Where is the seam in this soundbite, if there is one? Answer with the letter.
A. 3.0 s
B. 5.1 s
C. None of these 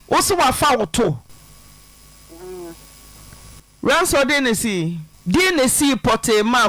B